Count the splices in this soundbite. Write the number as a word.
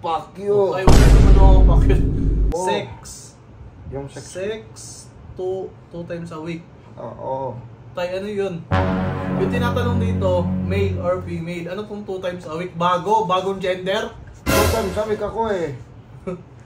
one